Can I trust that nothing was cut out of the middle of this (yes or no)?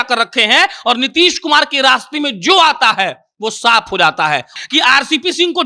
no